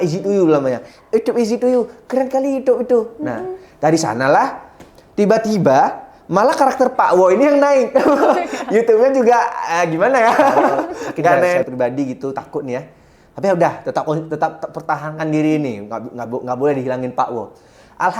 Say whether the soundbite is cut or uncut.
cut